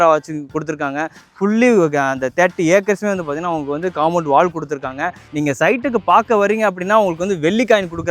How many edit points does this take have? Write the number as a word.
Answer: two